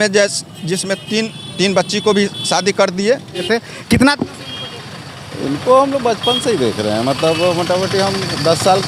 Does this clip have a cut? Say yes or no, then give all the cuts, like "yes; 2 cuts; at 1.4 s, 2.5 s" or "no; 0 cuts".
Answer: yes; 1 cut; at 3.5 s